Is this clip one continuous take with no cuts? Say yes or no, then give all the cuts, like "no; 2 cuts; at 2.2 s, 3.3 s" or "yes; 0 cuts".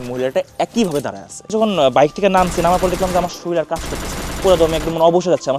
no; 1 cut; at 1.5 s